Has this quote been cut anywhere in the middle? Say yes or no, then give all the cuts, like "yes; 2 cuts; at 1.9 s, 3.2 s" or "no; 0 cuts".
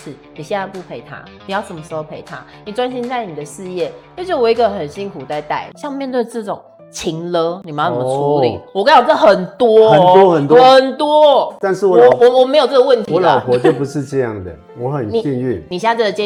no; 0 cuts